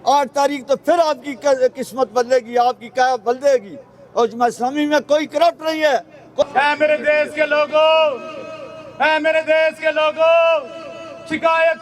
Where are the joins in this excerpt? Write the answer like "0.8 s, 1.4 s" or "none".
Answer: 6.4 s